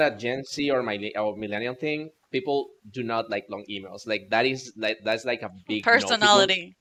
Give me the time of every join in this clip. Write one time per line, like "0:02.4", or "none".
none

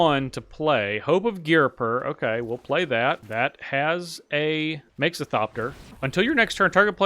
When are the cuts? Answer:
0:03.2
0:04.9
0:05.8

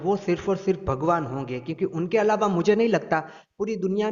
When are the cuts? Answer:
none

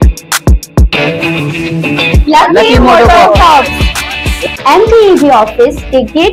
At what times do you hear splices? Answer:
none

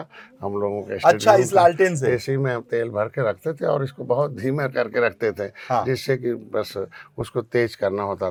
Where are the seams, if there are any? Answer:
none

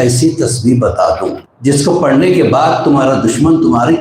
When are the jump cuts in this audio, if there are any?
0:01.5

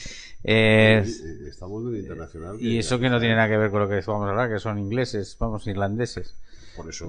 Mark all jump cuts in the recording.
0:01.7

